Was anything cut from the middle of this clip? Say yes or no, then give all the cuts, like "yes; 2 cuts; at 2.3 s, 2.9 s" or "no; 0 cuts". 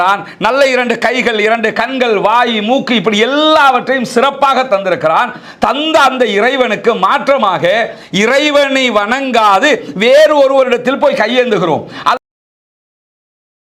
no; 0 cuts